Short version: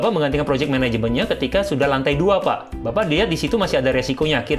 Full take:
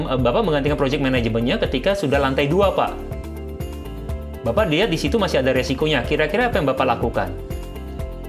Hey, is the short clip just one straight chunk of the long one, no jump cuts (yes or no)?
no